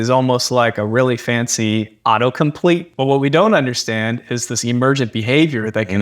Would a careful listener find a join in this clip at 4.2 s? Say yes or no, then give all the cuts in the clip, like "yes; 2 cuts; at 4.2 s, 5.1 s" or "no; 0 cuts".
no; 1 cut; at 2.9 s